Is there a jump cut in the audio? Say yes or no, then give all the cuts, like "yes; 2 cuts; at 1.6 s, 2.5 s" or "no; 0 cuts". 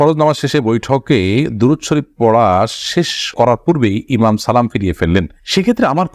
no; 0 cuts